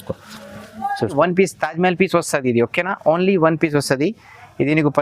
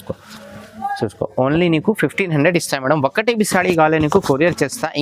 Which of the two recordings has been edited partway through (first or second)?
first